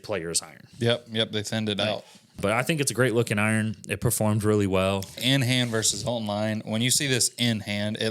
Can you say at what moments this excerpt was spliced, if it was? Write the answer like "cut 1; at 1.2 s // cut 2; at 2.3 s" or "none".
cut 1; at 2.4 s // cut 2; at 5.2 s